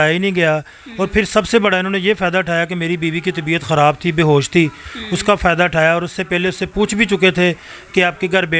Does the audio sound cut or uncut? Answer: uncut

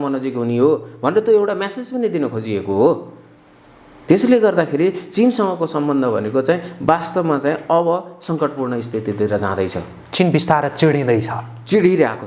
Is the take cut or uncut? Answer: uncut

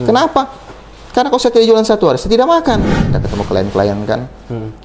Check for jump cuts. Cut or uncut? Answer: cut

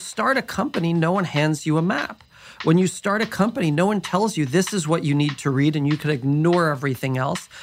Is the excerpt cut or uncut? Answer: uncut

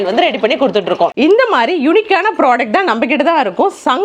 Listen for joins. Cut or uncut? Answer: cut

